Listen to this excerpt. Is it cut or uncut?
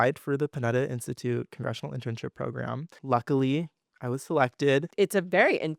cut